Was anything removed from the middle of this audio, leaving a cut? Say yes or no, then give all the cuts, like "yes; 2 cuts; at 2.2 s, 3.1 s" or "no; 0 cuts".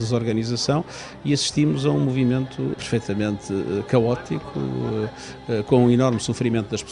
yes; 1 cut; at 2.7 s